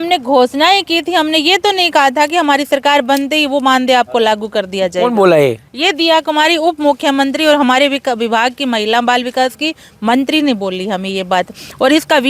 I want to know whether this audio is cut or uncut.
uncut